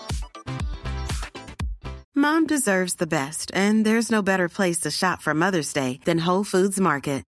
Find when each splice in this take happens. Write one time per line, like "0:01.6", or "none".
0:02.0